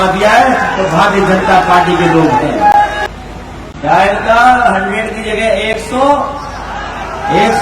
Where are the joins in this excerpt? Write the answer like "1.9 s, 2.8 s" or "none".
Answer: 3.0 s